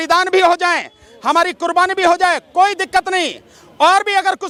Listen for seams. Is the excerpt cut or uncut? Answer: uncut